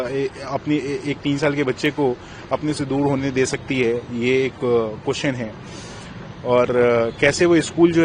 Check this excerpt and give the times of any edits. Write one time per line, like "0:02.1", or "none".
none